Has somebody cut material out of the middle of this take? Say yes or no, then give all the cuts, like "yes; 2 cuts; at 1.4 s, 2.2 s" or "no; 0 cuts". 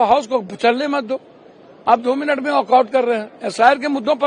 no; 0 cuts